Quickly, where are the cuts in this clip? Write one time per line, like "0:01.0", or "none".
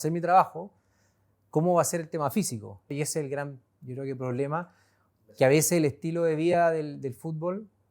0:02.9